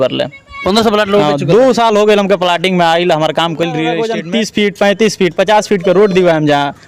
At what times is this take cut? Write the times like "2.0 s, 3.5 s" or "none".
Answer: 3.8 s